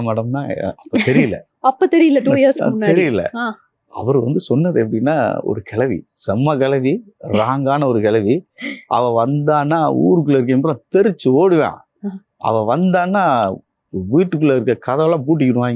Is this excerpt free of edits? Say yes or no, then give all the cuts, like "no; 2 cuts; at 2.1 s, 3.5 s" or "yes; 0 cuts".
yes; 0 cuts